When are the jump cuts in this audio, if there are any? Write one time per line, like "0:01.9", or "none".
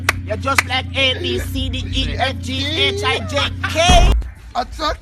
0:04.1